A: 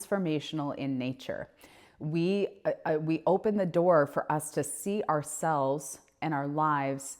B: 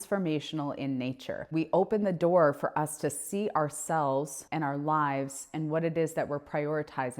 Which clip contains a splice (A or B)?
B